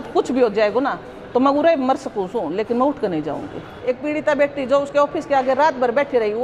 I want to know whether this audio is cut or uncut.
cut